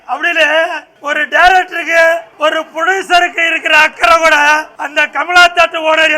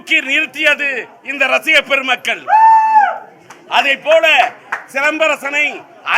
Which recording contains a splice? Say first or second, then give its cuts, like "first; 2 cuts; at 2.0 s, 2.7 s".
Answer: first; 3 cuts; at 0.9 s, 2.3 s, 4.8 s